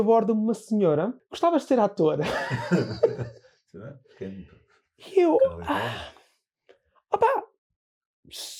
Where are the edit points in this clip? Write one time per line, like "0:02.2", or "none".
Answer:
0:01.2